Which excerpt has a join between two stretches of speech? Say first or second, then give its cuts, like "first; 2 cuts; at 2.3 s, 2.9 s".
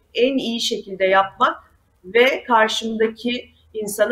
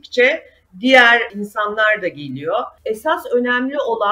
second; 1 cut; at 2.7 s